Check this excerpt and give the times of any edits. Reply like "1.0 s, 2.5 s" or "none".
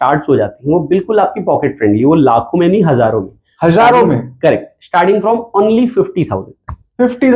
none